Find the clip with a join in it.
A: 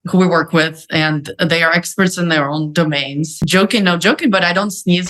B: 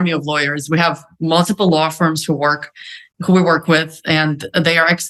A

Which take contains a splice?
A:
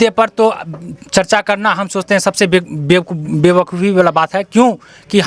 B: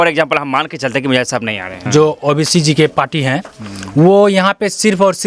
B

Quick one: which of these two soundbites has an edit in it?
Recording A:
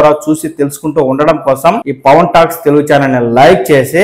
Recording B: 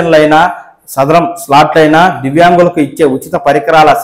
A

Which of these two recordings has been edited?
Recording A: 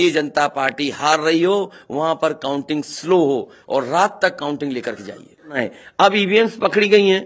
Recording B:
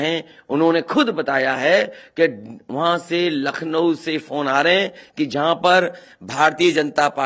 A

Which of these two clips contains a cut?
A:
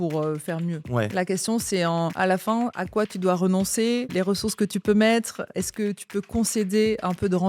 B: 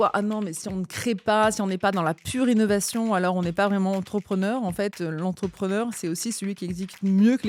A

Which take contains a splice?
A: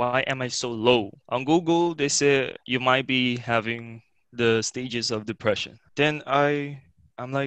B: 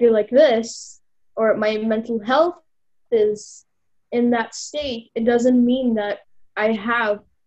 A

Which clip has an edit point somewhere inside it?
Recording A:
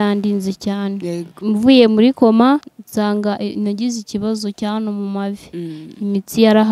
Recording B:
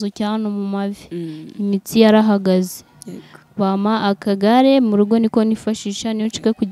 A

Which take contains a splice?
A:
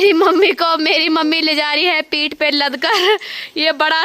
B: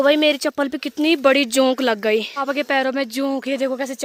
B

